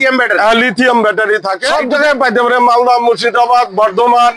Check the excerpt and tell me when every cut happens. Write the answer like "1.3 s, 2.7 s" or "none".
1.6 s